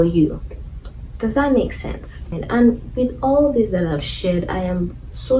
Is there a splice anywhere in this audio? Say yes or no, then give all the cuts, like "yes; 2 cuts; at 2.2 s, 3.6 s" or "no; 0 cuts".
yes; 1 cut; at 2.3 s